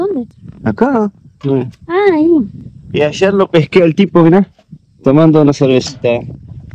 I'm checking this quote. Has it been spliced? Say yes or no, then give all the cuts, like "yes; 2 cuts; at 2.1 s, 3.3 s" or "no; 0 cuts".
no; 0 cuts